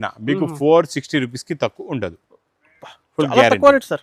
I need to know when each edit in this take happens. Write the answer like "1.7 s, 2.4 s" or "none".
none